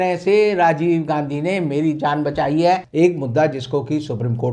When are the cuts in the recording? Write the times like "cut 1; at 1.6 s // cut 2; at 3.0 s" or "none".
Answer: cut 1; at 2.9 s